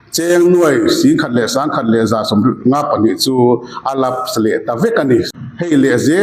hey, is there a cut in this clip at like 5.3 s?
yes; 1 cut; at 5.3 s

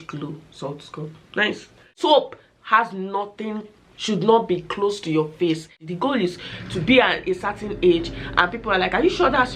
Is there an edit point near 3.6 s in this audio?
no; 2 cuts; at 1.9 s, 5.8 s

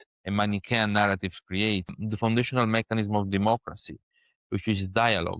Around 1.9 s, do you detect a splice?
yes; 1 cut; at 1.9 s

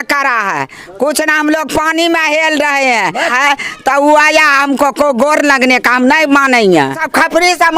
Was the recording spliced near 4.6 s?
no; 2 cuts; at 3.3 s, 7.0 s

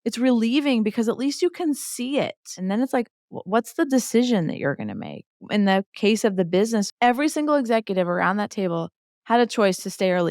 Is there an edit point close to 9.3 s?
no; 3 cuts; at 2.5 s, 5.5 s, 6.9 s

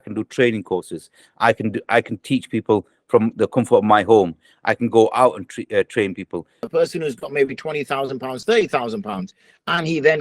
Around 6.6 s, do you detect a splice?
yes; 1 cut; at 6.6 s

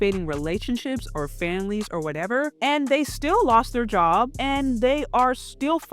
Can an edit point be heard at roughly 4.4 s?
yes; 2 cuts; at 2.5 s, 4.4 s

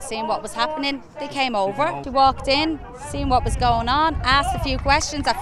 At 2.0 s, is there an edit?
yes; 1 cut; at 2.0 s

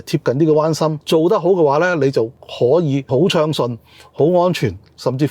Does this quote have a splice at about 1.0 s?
yes; 3 cuts; at 1.0 s, 2.4 s, 3.1 s

